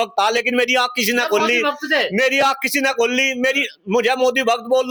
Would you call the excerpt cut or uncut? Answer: uncut